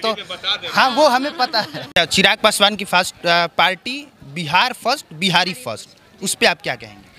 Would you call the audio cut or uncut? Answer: cut